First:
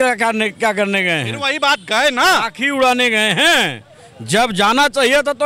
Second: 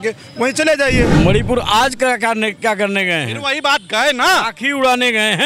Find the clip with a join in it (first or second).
second